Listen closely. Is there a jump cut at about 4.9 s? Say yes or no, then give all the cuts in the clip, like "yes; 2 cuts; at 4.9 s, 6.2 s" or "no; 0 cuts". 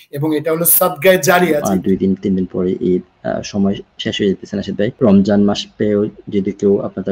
yes; 2 cuts; at 1.6 s, 4.9 s